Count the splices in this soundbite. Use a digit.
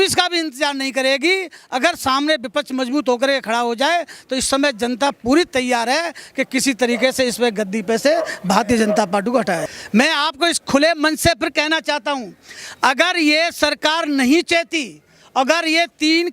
0